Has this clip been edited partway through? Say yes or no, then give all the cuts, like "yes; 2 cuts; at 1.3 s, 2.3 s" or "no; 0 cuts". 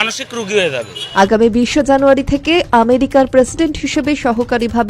yes; 1 cut; at 1.0 s